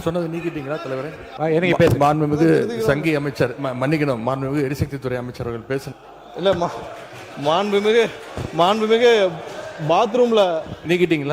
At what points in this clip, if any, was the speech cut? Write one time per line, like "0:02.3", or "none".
0:01.2